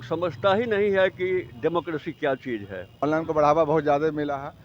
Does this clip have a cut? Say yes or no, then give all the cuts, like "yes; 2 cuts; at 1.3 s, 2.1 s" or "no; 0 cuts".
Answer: yes; 1 cut; at 2.8 s